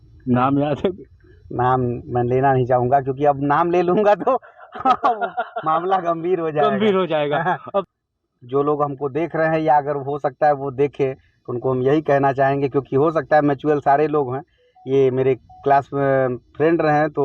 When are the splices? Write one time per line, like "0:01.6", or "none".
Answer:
0:07.9